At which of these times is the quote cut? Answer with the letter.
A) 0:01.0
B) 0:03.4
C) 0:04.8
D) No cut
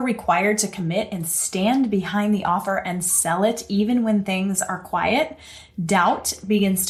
D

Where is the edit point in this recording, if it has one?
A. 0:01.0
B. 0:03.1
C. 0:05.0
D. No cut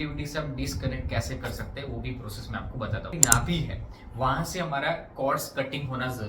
B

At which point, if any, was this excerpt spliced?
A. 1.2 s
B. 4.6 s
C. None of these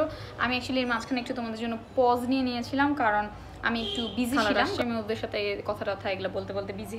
B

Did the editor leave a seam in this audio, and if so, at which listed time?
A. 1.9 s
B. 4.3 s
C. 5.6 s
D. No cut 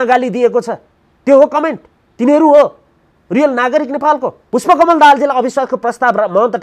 B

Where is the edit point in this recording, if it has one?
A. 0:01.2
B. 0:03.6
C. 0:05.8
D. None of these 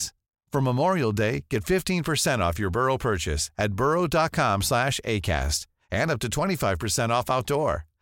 D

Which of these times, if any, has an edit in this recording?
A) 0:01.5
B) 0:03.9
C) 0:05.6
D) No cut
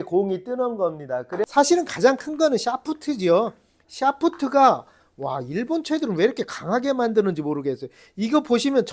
A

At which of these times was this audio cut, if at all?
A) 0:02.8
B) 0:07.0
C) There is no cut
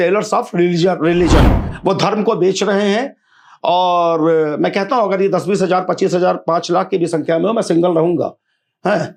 C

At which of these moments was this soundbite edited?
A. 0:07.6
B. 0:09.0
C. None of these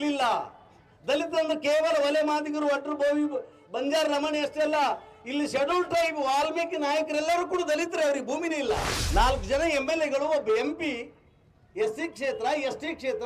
B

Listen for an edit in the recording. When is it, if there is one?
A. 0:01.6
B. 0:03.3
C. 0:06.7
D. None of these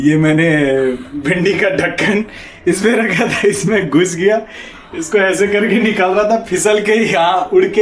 D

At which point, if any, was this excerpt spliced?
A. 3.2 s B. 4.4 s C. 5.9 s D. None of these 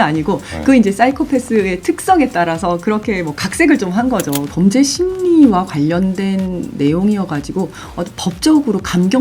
B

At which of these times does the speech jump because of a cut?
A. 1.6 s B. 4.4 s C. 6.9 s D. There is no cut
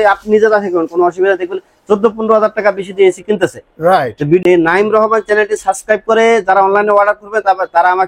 B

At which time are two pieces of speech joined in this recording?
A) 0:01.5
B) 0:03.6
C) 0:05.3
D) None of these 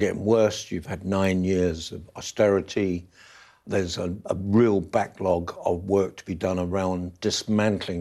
B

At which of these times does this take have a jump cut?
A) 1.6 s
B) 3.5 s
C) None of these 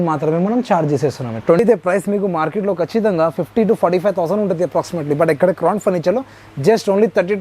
A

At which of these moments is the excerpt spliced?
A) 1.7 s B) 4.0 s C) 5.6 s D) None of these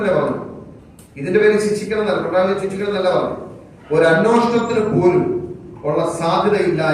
D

